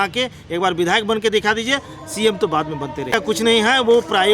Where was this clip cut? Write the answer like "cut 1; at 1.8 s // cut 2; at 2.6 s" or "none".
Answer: cut 1; at 3.2 s